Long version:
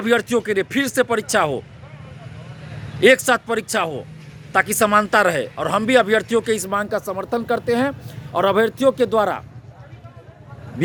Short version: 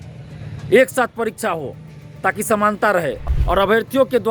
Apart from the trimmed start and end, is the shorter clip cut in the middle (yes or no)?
yes